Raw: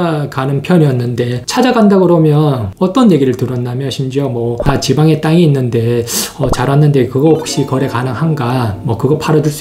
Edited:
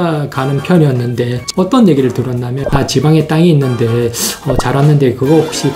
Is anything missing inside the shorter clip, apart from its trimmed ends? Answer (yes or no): yes